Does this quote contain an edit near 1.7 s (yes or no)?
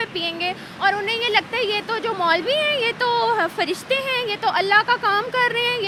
no